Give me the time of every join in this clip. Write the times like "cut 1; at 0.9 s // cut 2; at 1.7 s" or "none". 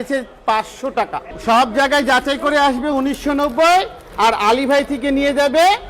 cut 1; at 1.3 s